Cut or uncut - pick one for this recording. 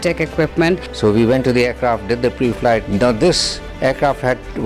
cut